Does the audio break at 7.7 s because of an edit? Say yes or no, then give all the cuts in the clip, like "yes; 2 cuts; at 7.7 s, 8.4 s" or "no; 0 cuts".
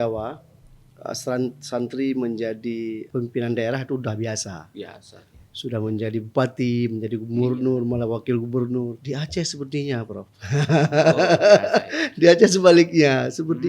no; 2 cuts; at 3.0 s, 9.0 s